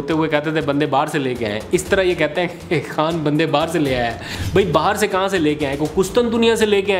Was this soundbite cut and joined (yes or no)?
yes